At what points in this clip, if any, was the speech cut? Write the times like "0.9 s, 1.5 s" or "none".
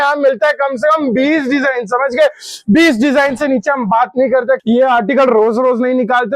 4.6 s